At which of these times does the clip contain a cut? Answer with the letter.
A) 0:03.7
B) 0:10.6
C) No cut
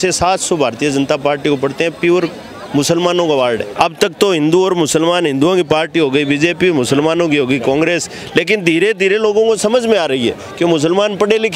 A